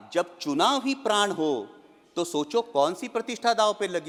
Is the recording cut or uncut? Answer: uncut